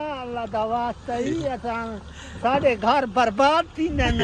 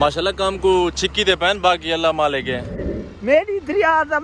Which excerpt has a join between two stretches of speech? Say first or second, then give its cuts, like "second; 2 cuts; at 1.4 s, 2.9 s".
second; 1 cut; at 2.5 s